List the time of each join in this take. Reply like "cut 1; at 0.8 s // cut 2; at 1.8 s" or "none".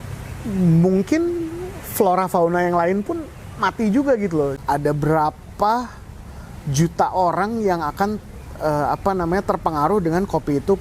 cut 1; at 4.6 s